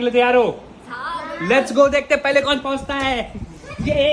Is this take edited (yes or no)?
no